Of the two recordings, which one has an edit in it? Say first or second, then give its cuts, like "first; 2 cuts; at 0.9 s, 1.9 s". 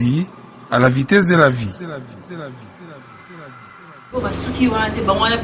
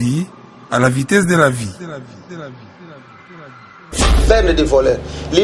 second; 1 cut; at 4.1 s